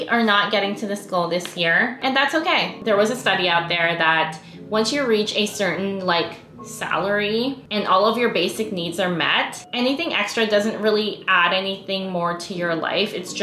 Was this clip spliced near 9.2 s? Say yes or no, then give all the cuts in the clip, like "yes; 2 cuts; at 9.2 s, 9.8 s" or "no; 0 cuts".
no; 1 cut; at 2.8 s